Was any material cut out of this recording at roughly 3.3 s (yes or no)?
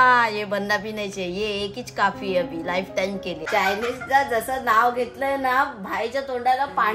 yes